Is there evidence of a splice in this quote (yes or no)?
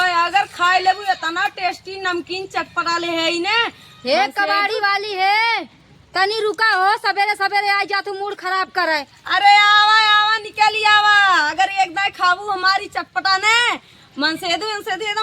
yes